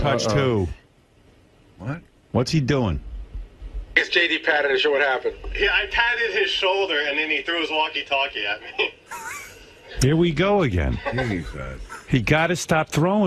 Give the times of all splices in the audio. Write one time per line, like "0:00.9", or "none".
none